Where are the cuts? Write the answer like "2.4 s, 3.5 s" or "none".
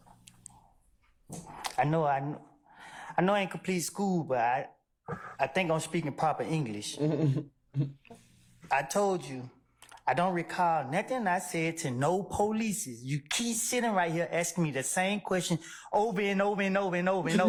none